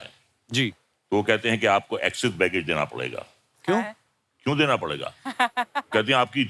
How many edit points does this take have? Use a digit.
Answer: 0